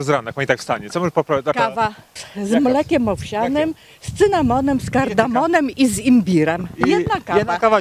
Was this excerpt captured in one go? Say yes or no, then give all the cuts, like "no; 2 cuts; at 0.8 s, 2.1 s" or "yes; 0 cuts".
no; 1 cut; at 1.6 s